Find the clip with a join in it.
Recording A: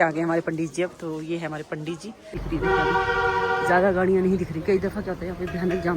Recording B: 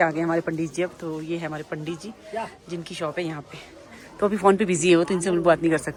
A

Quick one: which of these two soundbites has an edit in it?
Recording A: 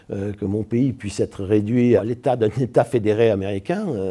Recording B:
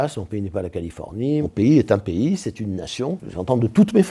B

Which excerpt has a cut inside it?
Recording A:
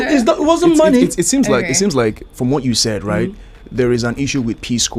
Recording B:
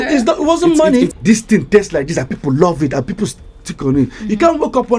B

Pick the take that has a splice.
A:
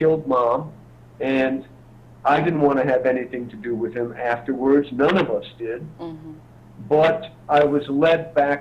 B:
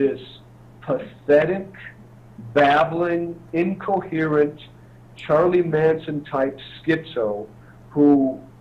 A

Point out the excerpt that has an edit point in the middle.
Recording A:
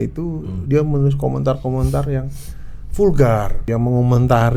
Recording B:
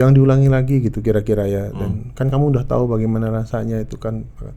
A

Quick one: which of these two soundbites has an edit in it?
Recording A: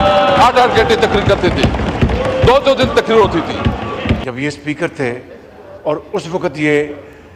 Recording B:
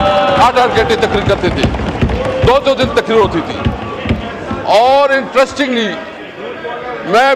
A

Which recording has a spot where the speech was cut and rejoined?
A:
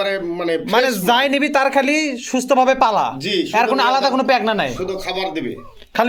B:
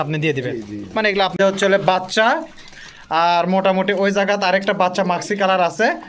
B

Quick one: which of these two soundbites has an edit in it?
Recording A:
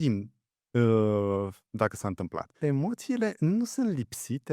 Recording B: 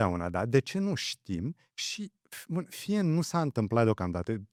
A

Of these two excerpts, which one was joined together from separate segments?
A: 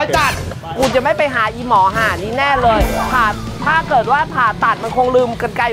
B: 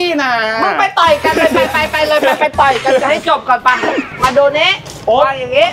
B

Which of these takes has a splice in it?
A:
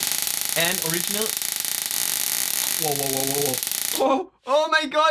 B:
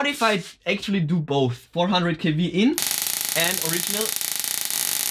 B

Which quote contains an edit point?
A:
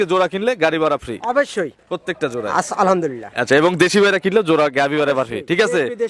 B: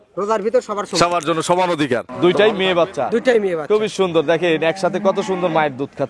B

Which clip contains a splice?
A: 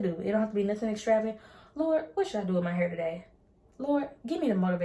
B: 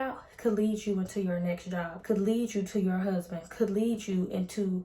B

